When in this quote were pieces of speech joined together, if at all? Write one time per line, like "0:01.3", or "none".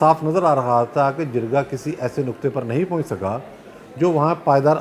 none

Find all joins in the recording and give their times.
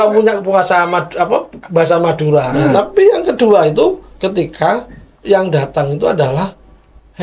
0:02.7

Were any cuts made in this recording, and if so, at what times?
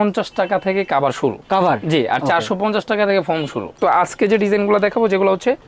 0:03.7

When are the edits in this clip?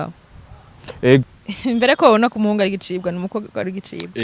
0:01.4

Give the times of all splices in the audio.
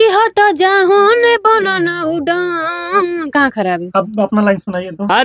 none

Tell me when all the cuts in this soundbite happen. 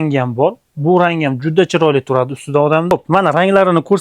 0:02.9

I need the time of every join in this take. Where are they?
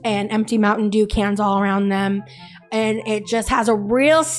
0:02.0

